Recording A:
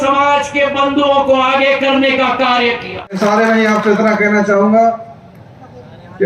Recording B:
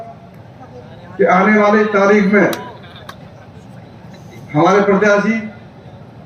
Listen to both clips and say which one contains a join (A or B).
A